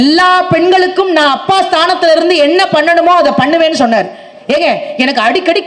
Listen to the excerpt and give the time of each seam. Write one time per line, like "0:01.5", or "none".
0:04.3